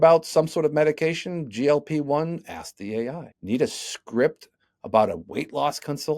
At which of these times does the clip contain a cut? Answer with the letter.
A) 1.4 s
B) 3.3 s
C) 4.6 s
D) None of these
B